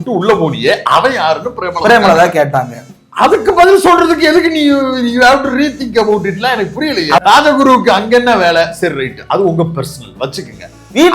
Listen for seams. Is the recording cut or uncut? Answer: cut